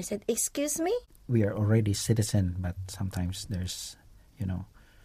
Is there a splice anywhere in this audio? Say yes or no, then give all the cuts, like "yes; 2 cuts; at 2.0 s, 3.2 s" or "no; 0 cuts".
yes; 1 cut; at 1.1 s